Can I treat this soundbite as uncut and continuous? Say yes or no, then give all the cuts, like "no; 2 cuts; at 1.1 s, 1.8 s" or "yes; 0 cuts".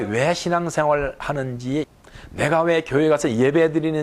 no; 1 cut; at 1.9 s